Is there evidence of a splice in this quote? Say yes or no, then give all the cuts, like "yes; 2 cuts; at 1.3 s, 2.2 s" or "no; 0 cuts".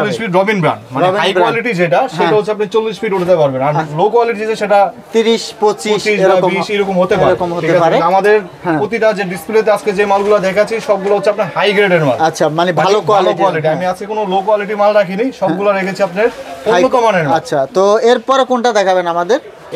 no; 0 cuts